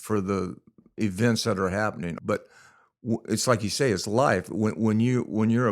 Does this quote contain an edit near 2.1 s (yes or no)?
yes